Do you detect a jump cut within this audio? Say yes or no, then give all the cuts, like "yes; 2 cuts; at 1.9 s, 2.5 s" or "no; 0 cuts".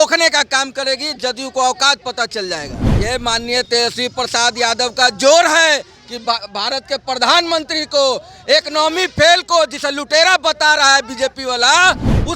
yes; 1 cut; at 2.8 s